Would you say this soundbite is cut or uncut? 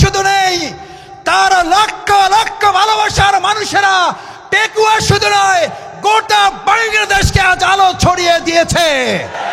uncut